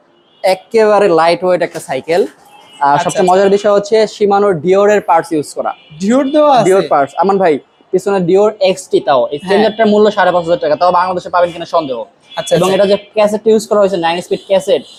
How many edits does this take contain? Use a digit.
0